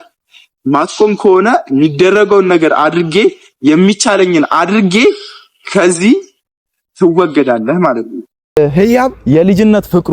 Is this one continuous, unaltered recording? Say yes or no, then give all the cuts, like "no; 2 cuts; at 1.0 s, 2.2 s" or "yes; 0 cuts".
no; 1 cut; at 8.6 s